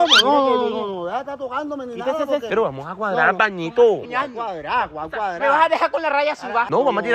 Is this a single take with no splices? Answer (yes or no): no